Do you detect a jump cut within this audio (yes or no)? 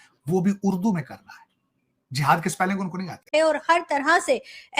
yes